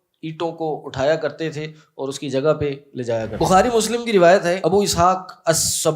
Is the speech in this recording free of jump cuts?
no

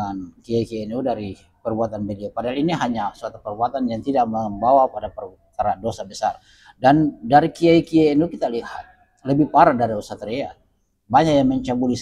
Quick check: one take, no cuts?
yes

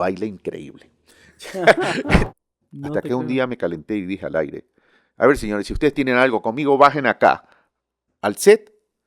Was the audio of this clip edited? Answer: yes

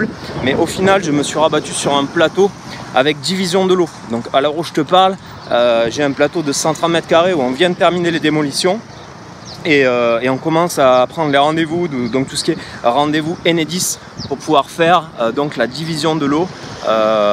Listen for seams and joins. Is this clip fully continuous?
yes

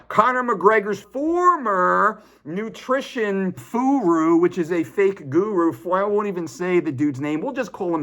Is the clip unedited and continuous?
no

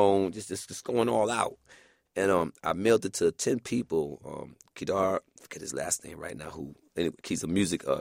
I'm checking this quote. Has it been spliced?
no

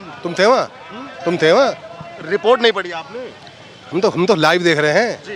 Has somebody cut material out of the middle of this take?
no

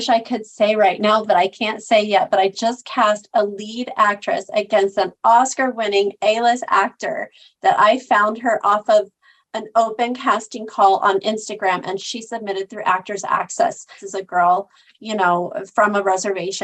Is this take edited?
yes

